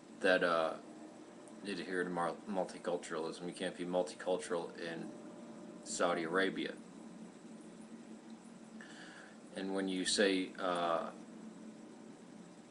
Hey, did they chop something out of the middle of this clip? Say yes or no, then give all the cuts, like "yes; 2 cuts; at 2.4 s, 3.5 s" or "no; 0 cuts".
yes; 1 cut; at 10.5 s